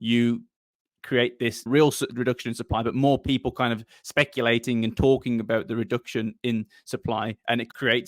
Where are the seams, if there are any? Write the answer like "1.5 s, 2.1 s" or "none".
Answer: 1.7 s